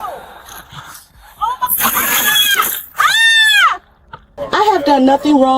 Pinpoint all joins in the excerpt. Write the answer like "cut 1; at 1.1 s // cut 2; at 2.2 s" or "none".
cut 1; at 4.4 s